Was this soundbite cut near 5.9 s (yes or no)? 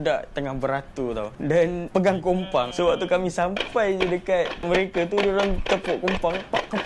no